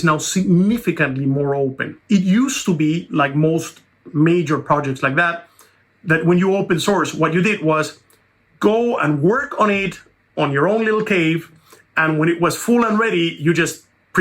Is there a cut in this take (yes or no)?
yes